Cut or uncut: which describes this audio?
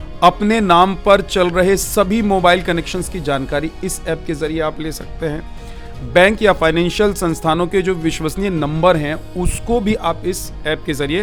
uncut